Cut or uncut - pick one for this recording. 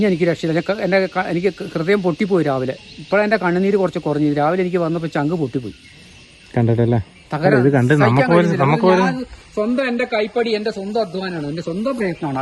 uncut